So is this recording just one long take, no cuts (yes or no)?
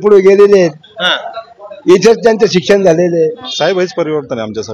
no